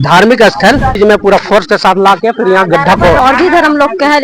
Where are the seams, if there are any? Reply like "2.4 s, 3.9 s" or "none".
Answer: 1.0 s, 3.2 s